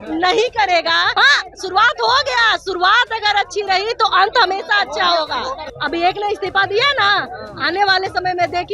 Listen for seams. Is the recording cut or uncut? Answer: cut